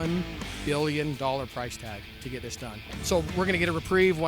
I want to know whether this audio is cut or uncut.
cut